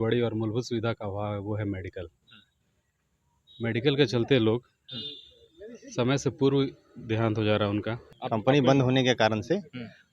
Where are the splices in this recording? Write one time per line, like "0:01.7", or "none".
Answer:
0:08.1